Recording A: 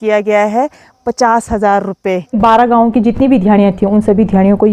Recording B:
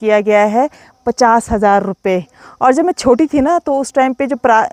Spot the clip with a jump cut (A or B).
A